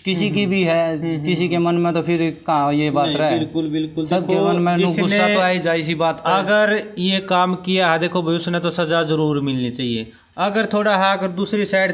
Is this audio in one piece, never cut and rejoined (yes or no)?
yes